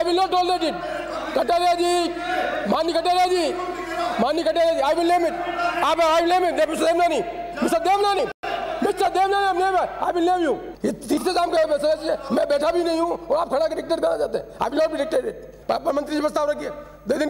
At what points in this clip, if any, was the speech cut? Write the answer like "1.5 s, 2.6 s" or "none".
10.7 s, 15.5 s